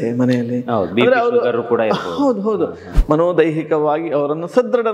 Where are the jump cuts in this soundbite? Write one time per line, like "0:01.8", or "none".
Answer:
0:02.9